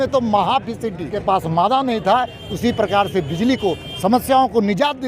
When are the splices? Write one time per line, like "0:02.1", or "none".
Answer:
0:01.2